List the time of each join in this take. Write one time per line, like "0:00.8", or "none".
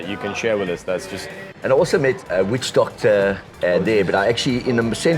0:01.4